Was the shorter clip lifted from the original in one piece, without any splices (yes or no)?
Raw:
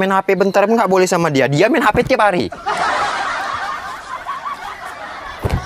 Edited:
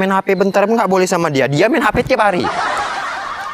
no